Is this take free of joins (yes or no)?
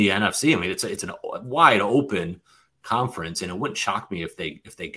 yes